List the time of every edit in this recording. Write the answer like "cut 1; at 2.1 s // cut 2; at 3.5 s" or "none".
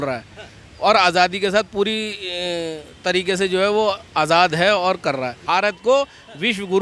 cut 1; at 5.4 s

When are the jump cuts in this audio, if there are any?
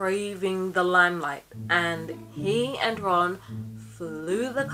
cut 1; at 1.5 s

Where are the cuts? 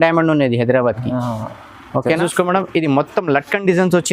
cut 1; at 2.2 s

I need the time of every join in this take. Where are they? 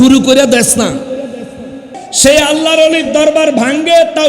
cut 1; at 2.1 s

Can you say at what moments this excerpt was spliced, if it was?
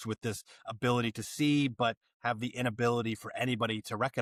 none

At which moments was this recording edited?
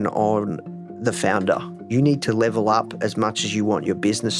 cut 1; at 1.9 s

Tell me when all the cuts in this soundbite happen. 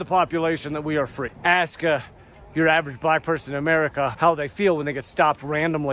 cut 1; at 1.2 s // cut 2; at 4.1 s

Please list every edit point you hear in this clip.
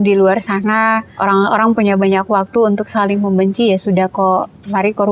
cut 1; at 1.1 s

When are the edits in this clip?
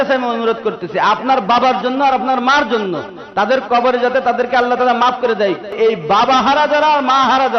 cut 1; at 5.7 s

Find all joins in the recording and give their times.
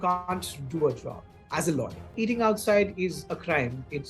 cut 1; at 2.0 s

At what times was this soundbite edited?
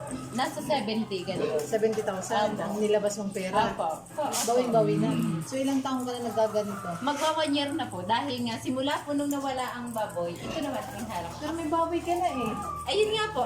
cut 1; at 4.1 s

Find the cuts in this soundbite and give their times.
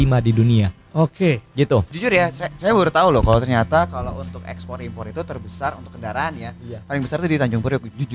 cut 1; at 1.9 s

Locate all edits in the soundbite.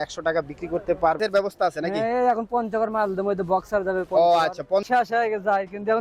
cut 1; at 1.2 s // cut 2; at 4.9 s

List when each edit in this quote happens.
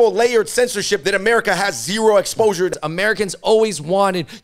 cut 1; at 1.0 s // cut 2; at 2.8 s

